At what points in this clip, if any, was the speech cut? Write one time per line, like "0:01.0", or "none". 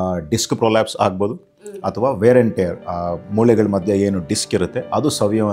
none

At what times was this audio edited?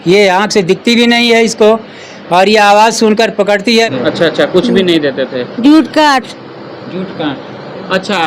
0:03.9

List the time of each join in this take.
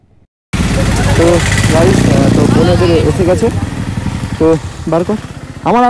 none

